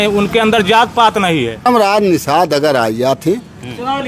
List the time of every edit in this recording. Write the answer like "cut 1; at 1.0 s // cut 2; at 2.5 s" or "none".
cut 1; at 1.7 s